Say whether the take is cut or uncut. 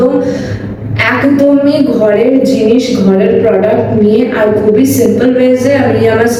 uncut